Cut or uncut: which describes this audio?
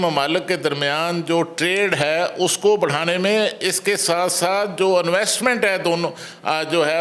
uncut